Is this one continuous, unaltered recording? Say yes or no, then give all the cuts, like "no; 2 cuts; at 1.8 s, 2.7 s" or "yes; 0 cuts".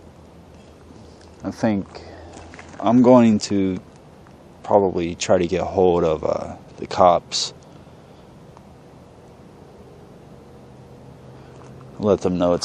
yes; 0 cuts